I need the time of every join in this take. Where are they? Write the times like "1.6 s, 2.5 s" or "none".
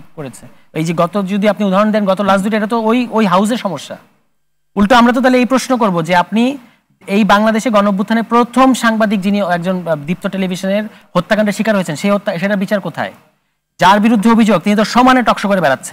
none